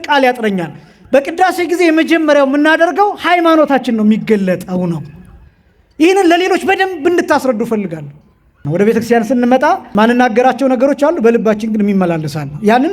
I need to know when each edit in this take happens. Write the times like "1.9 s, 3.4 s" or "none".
8.6 s, 9.9 s